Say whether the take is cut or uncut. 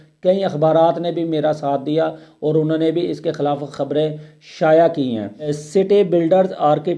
cut